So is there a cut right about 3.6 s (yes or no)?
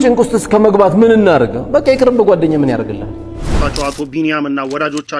yes